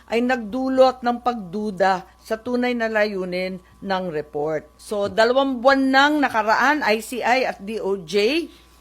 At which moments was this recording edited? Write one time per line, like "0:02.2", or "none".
0:04.8